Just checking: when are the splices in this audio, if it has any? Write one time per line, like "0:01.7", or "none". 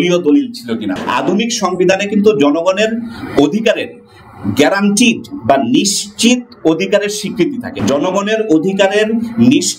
0:00.9
0:07.6